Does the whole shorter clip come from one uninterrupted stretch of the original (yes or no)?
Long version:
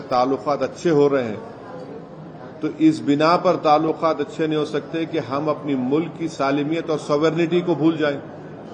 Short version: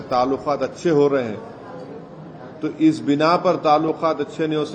yes